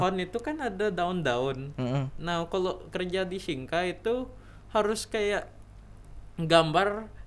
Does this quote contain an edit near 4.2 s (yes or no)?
no